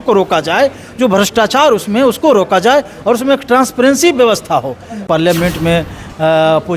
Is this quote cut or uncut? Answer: cut